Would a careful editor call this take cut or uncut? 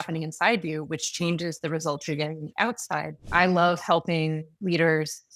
cut